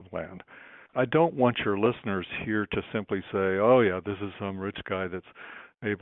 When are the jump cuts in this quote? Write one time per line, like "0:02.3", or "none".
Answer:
0:00.9